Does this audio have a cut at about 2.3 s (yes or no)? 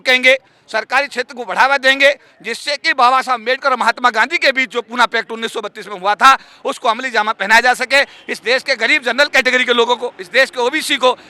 no